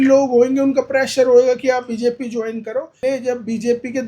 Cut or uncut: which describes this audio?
cut